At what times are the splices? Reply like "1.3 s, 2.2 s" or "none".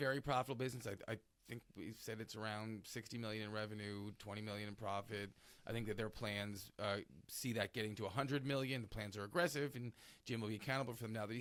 none